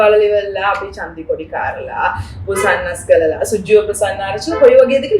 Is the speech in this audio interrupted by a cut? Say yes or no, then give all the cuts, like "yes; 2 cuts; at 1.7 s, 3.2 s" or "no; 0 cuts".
no; 0 cuts